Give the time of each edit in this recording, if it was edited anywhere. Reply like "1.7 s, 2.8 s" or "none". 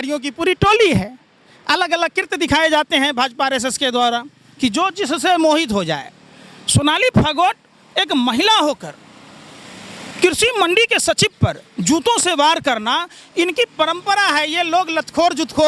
none

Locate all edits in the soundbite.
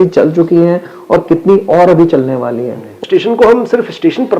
3.0 s

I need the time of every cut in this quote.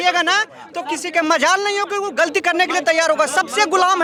none

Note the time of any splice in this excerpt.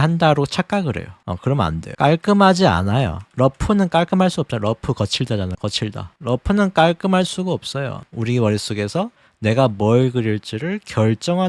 8.0 s

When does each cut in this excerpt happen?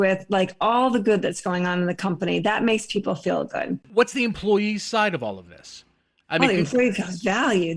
3.9 s

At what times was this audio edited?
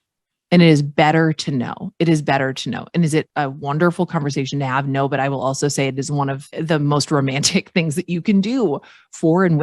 3.3 s, 6.4 s

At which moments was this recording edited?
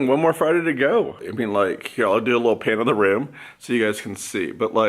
1.2 s

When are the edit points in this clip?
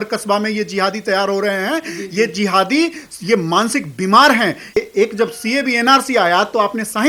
4.8 s

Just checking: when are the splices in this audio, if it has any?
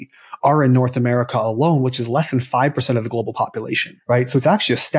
3.9 s

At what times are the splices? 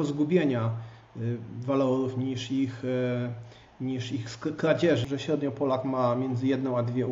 5.0 s

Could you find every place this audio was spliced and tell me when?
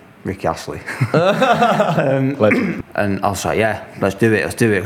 2.8 s

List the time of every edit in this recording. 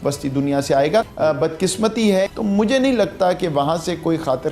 1.1 s, 2.3 s

